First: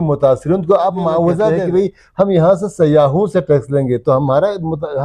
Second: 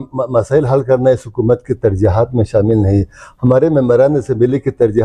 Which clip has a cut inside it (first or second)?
first